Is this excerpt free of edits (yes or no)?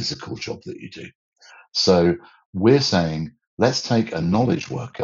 yes